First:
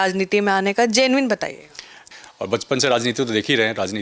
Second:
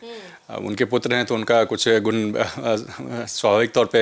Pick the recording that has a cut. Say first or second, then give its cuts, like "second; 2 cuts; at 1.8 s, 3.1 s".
first; 1 cut; at 1.9 s